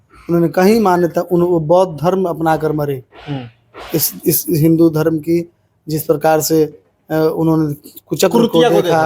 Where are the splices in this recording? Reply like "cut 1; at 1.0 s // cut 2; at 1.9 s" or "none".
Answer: none